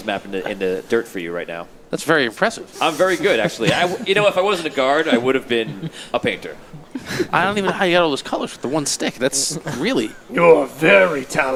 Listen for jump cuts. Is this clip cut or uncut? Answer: uncut